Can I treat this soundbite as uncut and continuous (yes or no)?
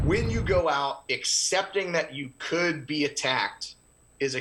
yes